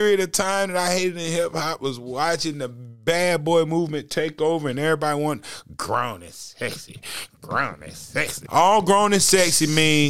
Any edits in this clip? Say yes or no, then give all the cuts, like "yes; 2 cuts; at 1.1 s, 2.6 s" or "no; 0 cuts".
yes; 1 cut; at 8.4 s